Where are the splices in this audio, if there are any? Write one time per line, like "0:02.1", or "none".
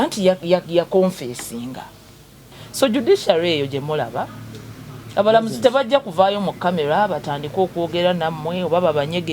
0:02.4

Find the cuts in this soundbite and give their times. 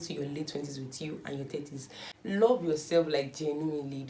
0:02.0

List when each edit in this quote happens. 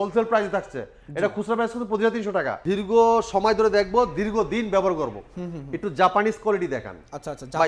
0:02.6

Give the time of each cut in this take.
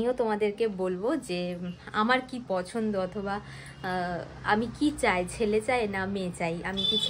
none

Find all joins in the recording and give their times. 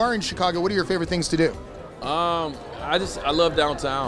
none

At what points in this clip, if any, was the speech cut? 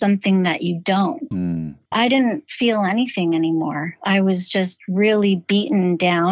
0:01.3

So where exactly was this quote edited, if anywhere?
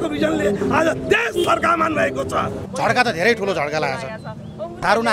0:02.6

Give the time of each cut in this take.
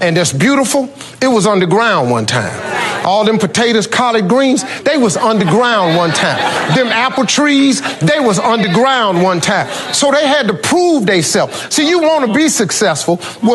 none

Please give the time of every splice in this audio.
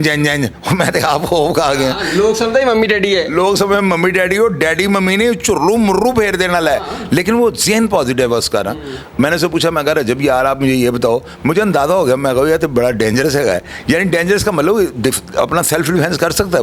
none

